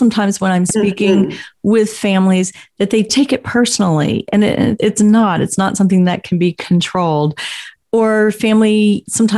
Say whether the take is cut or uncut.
uncut